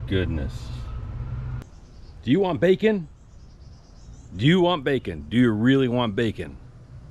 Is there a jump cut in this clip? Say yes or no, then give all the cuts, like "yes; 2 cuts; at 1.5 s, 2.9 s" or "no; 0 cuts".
yes; 1 cut; at 1.6 s